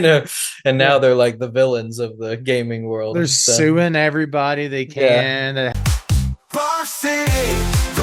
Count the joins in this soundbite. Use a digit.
1